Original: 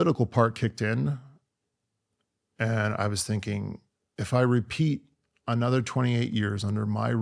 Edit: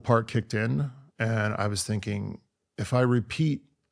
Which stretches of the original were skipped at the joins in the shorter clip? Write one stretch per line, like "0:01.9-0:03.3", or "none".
0:01.3-0:02.4